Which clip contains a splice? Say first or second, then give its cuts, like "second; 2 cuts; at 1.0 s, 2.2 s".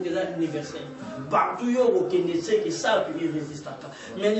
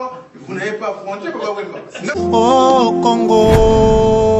second; 1 cut; at 2.1 s